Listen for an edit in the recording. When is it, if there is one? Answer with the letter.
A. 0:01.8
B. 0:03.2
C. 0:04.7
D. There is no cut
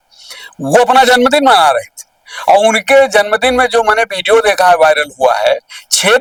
D